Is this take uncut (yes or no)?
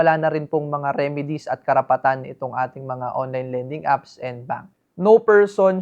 no